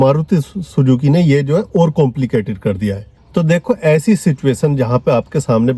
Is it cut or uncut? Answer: cut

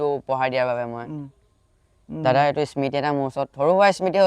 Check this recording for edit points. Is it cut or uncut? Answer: uncut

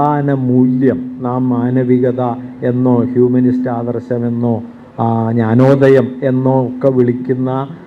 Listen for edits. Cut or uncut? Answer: uncut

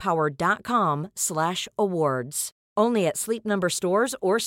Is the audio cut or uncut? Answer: uncut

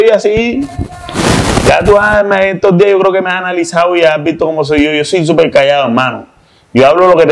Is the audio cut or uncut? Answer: uncut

